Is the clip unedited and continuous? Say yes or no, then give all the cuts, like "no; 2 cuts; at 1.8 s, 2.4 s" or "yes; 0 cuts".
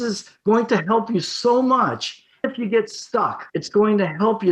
no; 1 cut; at 3.5 s